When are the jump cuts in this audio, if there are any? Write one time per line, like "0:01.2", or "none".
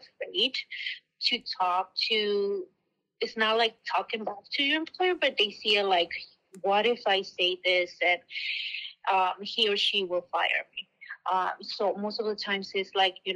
none